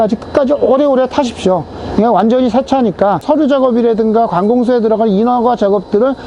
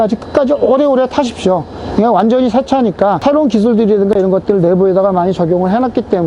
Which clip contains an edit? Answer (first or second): first